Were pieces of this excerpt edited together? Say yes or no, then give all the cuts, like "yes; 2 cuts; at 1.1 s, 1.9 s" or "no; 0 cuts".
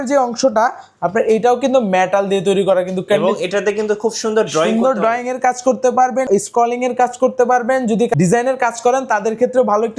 yes; 2 cuts; at 6.3 s, 8.1 s